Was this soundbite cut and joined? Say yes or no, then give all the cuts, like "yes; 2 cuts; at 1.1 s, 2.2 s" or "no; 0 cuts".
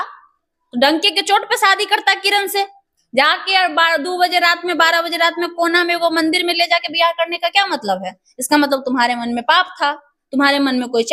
no; 0 cuts